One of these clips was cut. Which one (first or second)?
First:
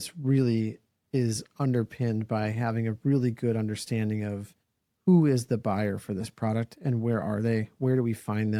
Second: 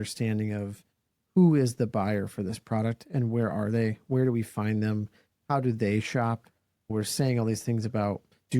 second